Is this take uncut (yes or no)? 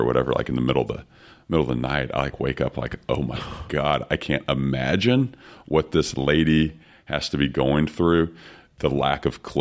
yes